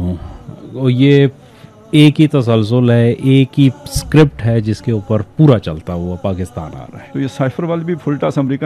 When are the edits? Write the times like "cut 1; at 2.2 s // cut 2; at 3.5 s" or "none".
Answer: cut 1; at 7.0 s